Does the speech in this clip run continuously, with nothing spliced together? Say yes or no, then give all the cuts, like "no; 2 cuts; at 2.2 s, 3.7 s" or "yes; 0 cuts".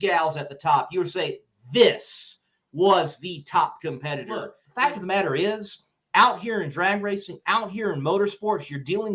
no; 1 cut; at 4.6 s